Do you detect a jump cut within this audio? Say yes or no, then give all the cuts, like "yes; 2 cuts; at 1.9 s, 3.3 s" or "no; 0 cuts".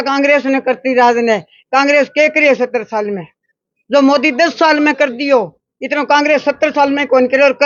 no; 0 cuts